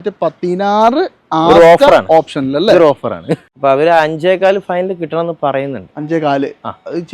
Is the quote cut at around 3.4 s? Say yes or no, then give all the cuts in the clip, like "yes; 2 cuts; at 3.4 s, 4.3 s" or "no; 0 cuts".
yes; 1 cut; at 3.4 s